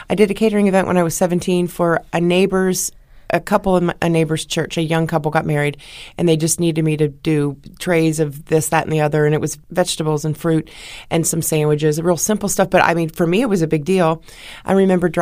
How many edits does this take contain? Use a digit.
0